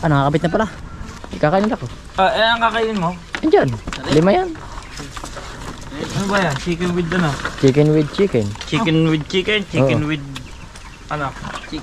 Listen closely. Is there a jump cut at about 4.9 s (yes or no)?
no